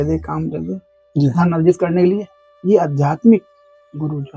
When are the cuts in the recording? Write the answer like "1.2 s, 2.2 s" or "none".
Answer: none